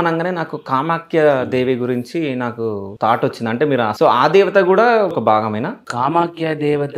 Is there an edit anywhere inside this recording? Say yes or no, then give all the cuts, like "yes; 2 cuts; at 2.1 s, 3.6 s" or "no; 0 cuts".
yes; 3 cuts; at 2.9 s, 3.9 s, 5.4 s